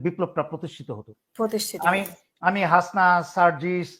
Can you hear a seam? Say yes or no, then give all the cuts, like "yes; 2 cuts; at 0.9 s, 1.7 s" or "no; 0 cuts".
no; 0 cuts